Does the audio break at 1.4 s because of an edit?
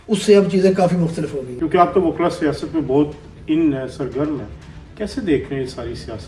yes; 1 cut; at 1.4 s

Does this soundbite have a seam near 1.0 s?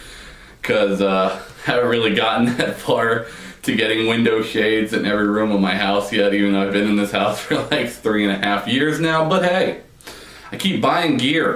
yes; 1 cut; at 1.0 s

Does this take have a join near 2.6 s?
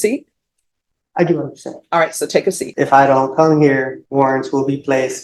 yes; 2 cuts; at 2.6 s, 4.0 s

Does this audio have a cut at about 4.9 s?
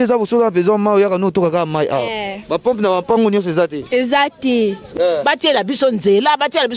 yes; 1 cut; at 4.9 s

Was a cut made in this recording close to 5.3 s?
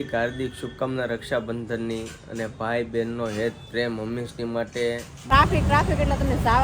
yes; 1 cut; at 5.3 s

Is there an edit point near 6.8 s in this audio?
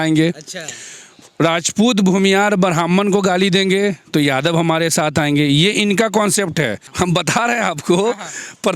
yes; 1 cut; at 6.8 s

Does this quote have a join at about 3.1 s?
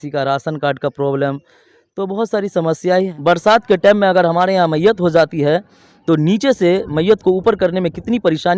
yes; 1 cut; at 3.1 s

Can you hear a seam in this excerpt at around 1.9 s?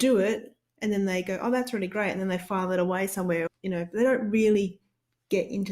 no; 1 cut; at 3.4 s

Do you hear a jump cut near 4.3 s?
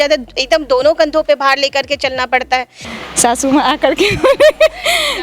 no; 1 cut; at 2.8 s

